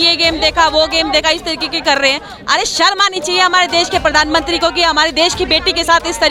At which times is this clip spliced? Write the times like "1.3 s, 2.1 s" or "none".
none

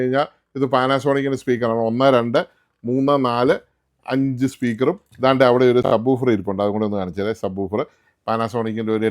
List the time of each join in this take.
2.9 s

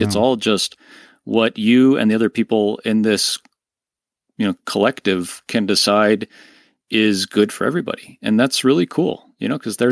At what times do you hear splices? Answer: none

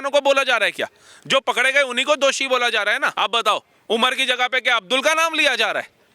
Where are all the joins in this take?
3.1 s

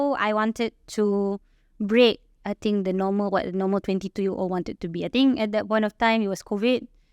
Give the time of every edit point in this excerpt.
none

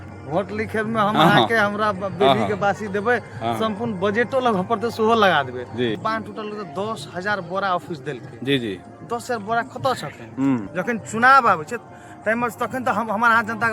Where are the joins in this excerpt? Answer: 6.0 s, 10.7 s

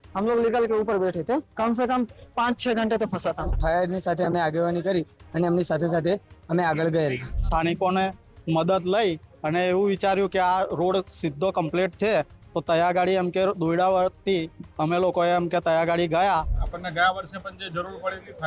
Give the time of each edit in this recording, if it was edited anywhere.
1.5 s, 3.5 s, 7.3 s, 16.6 s

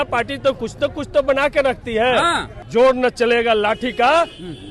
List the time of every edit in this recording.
2.5 s

